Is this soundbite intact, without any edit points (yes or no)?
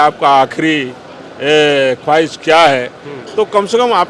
yes